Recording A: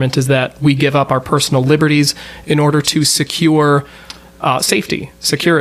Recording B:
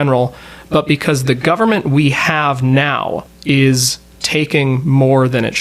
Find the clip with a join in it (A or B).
B